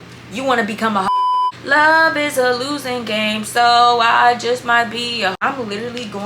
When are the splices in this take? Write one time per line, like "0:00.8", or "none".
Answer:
0:01.1
0:05.4